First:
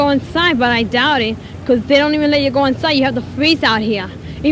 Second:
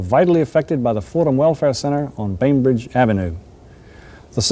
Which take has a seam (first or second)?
first